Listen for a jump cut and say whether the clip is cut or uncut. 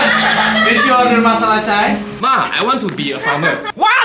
cut